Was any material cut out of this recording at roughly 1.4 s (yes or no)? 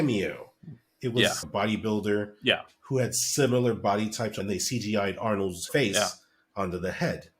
yes